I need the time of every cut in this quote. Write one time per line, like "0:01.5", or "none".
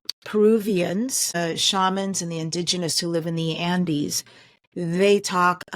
0:01.4